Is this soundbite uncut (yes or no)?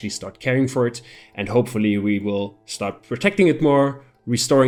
yes